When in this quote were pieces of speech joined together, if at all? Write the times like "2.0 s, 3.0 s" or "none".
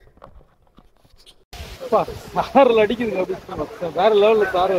1.4 s